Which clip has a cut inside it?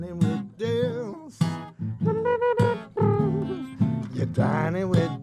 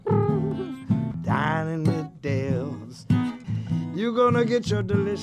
second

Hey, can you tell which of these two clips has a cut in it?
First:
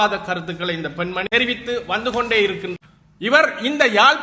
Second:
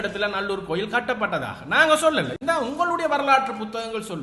first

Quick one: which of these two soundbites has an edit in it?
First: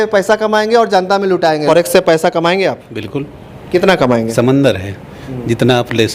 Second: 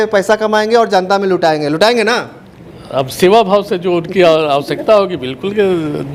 first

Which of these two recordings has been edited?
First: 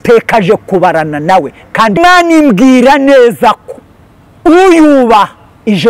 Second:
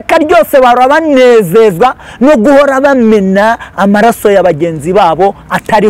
first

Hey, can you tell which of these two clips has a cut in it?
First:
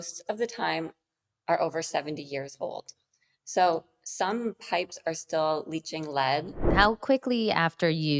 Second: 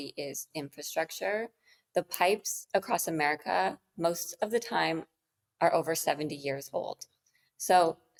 first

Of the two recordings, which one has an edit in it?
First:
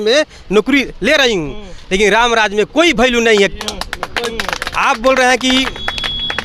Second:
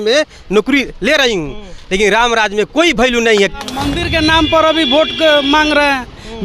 second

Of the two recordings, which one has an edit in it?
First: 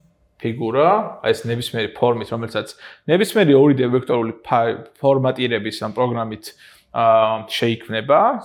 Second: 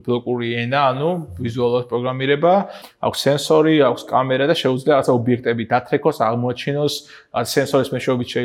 second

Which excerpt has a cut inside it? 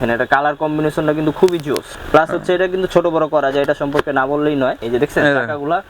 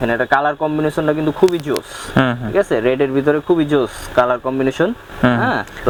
first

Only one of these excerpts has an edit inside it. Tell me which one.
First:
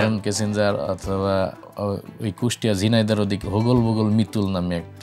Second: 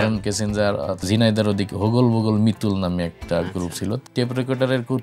second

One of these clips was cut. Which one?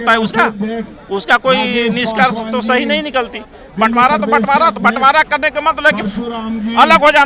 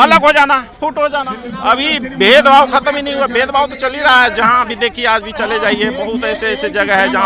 second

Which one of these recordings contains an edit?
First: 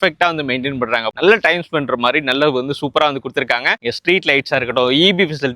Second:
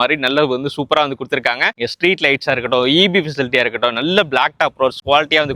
first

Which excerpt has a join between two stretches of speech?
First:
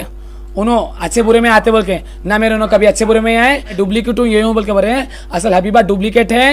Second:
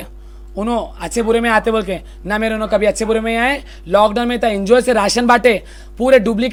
first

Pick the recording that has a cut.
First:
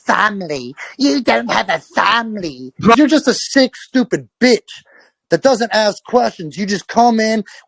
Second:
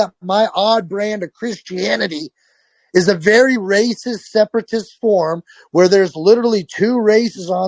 first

